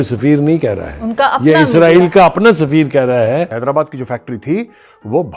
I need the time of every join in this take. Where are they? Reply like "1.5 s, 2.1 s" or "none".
3.5 s